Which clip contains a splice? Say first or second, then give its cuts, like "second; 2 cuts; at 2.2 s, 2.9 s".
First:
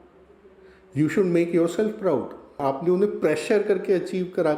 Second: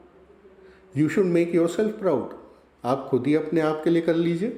first; 1 cut; at 2.5 s